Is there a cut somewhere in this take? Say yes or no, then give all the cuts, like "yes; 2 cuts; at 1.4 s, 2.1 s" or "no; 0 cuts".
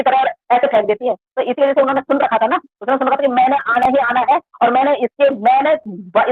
no; 0 cuts